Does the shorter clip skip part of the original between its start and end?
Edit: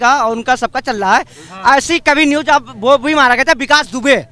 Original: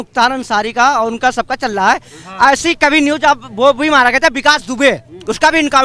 no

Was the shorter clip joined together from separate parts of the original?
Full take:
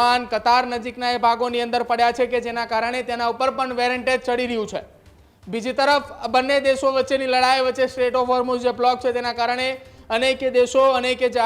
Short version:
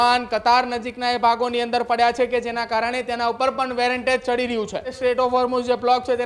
yes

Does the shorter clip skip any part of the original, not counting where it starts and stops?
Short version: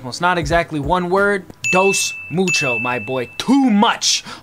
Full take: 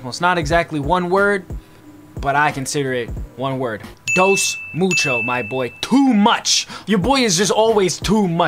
yes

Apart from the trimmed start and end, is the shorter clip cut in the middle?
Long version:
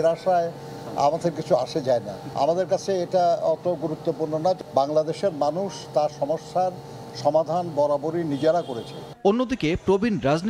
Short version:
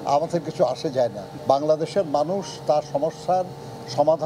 yes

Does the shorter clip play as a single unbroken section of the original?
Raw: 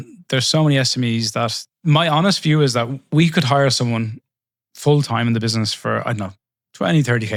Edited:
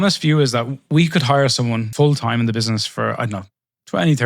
no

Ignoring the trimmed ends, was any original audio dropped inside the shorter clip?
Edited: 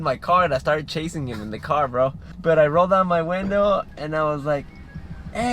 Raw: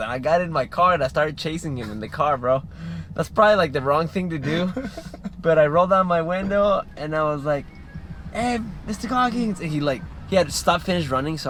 yes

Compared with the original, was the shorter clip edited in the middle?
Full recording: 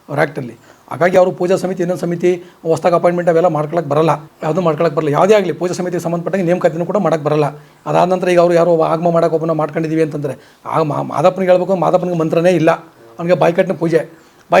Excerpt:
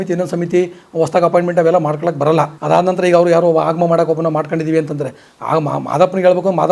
yes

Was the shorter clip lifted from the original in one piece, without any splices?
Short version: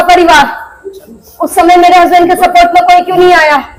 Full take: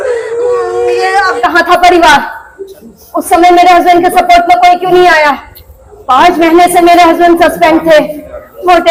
yes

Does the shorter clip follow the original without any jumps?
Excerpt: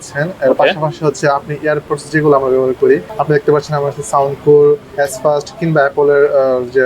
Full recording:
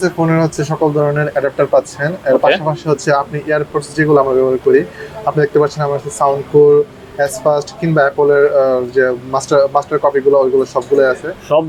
no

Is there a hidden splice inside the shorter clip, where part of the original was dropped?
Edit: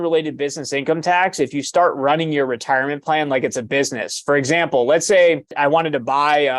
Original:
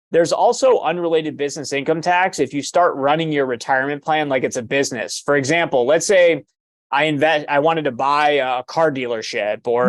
yes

